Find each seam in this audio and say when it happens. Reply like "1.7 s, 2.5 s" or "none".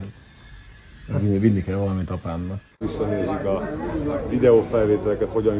2.7 s